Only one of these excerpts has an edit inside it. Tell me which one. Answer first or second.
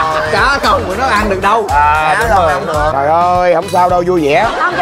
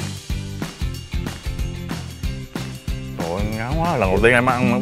first